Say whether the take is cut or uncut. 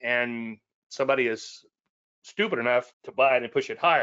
cut